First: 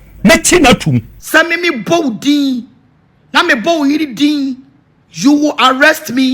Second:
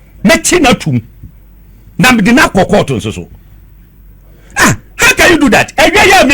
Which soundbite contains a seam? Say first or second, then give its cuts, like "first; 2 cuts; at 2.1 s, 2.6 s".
first; 1 cut; at 1.1 s